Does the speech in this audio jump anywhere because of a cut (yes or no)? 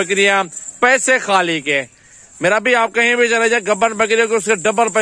no